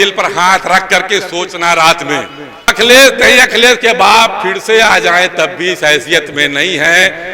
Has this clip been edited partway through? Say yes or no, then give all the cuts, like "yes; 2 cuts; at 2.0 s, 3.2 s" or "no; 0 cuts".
yes; 1 cut; at 2.7 s